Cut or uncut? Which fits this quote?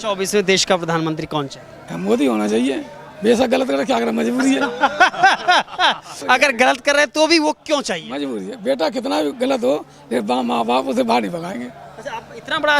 cut